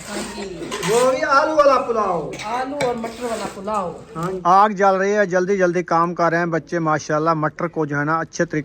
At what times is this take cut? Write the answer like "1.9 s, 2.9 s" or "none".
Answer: 4.4 s